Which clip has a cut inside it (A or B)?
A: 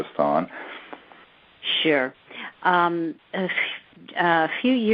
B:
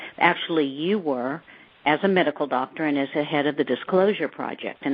A